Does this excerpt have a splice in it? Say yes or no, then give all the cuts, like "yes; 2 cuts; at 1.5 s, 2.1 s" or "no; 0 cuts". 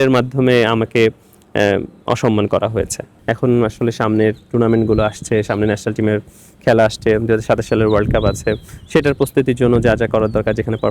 yes; 1 cut; at 3.1 s